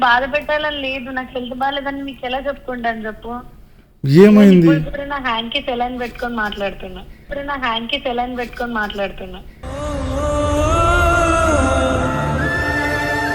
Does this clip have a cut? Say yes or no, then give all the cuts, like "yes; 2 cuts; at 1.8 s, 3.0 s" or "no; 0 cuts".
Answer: no; 0 cuts